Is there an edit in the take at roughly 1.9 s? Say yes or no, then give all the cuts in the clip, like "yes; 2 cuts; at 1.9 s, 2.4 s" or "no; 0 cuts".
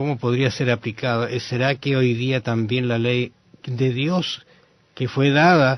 yes; 1 cut; at 1.9 s